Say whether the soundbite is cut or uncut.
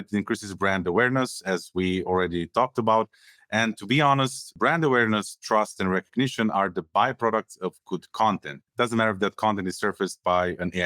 cut